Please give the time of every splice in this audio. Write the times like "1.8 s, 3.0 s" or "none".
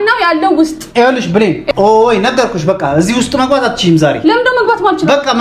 1.7 s